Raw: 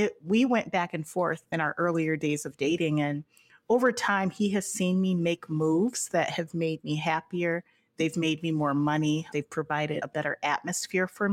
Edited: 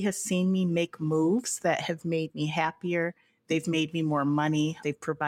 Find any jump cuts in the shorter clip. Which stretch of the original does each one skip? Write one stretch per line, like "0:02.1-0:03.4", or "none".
none